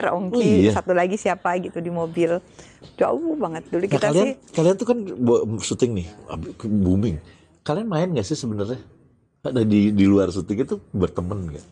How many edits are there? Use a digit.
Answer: 0